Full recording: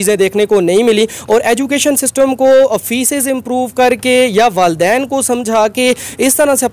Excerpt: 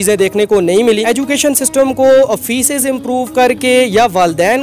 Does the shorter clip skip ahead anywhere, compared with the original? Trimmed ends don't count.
yes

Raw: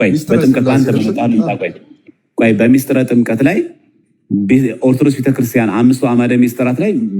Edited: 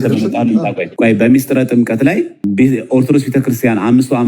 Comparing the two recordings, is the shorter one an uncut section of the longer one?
no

